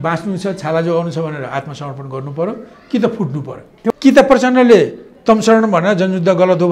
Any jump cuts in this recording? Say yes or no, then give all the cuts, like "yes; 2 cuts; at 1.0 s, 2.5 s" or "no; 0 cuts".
yes; 1 cut; at 3.9 s